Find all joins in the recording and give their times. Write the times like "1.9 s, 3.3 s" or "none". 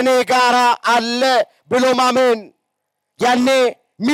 none